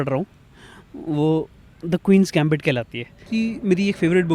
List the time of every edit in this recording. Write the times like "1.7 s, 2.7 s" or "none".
3.4 s

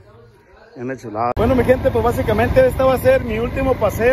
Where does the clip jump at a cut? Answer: 1.3 s

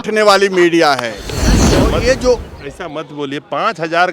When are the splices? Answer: 1.5 s

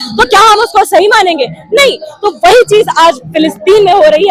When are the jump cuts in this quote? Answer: none

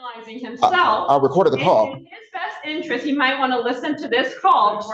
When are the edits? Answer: none

